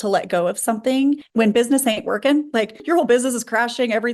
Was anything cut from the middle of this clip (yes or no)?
yes